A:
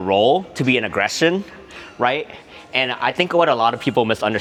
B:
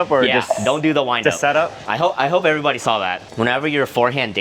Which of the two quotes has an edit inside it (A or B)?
B